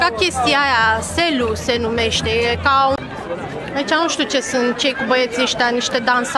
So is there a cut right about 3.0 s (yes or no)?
yes